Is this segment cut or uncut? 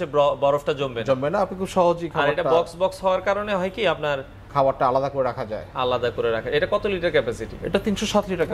uncut